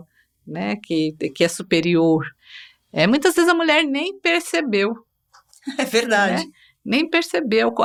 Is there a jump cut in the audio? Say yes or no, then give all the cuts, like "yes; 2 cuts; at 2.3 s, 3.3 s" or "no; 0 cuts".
no; 0 cuts